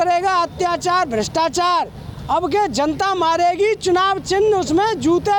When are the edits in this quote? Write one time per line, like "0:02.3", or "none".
none